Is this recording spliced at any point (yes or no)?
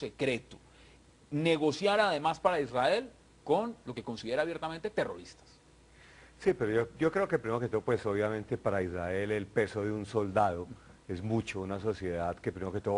no